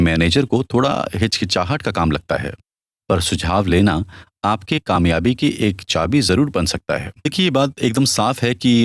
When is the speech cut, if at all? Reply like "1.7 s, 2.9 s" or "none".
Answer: 7.3 s